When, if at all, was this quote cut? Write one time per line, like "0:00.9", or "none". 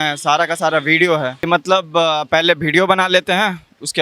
0:01.4

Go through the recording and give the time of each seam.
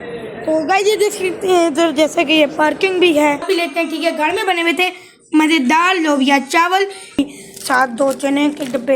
0:03.5
0:07.2

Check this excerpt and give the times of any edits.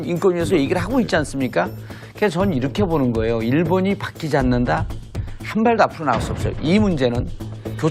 none

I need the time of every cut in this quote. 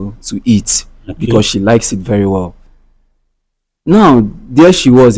none

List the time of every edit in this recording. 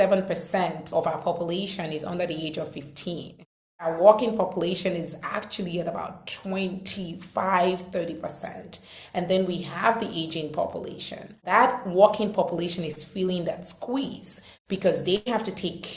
0:00.9
0:03.9
0:11.4

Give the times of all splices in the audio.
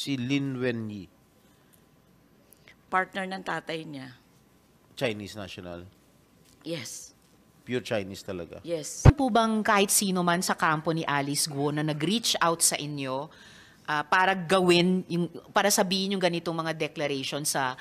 0:09.1

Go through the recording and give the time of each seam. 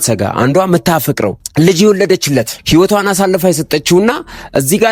0:01.4
0:02.6

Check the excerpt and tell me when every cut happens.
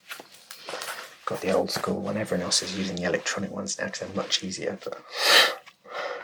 none

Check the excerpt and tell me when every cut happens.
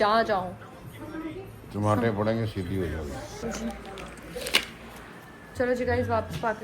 0:03.4

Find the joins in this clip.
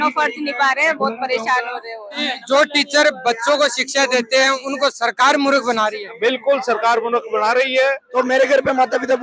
0:02.3
0:08.0

